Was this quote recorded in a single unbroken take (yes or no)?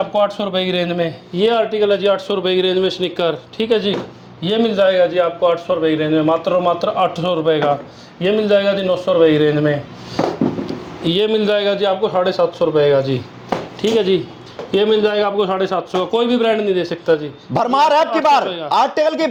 yes